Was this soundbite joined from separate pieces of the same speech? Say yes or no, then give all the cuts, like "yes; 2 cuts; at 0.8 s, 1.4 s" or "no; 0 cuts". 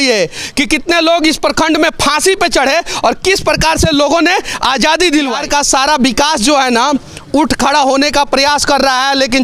yes; 1 cut; at 5.4 s